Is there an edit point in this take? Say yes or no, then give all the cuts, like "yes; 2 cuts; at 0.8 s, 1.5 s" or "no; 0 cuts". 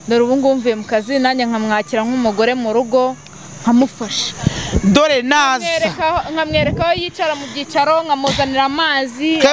no; 0 cuts